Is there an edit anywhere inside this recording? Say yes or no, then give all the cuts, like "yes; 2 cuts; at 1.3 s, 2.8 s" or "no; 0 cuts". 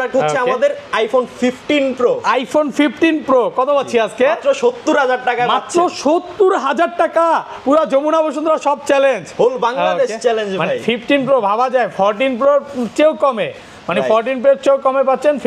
no; 0 cuts